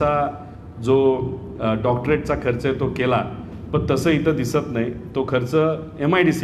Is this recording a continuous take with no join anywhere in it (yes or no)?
yes